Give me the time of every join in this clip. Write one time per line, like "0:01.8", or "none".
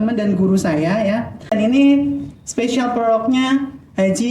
0:01.5

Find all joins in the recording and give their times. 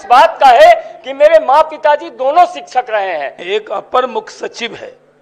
0:03.4

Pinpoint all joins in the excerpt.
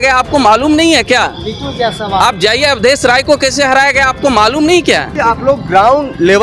0:05.2

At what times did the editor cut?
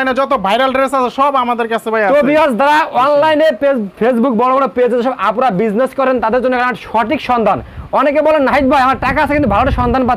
none

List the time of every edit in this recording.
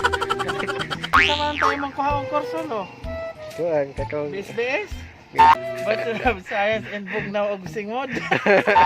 0:01.1
0:05.5

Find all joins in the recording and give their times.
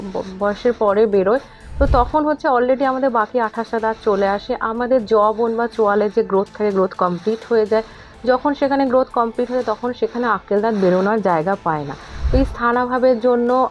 none

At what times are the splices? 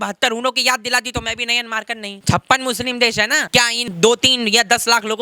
0:02.1
0:03.9

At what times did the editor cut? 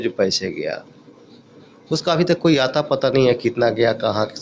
none

